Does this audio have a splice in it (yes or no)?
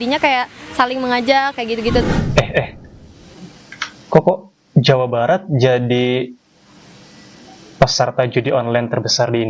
yes